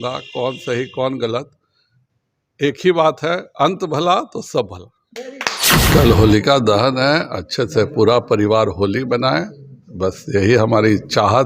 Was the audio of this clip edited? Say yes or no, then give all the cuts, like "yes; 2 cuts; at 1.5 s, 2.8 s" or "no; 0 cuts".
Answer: yes; 1 cut; at 5.7 s